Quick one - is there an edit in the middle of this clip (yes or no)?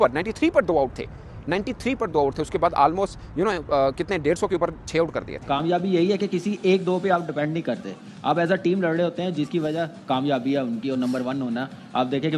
yes